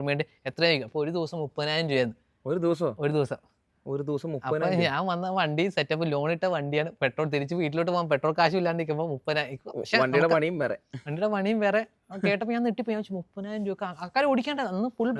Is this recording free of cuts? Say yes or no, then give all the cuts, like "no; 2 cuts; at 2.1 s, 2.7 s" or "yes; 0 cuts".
yes; 0 cuts